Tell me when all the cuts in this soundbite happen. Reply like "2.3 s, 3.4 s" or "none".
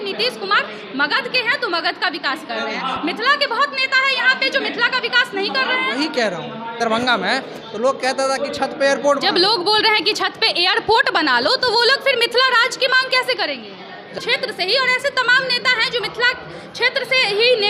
6.8 s, 14.2 s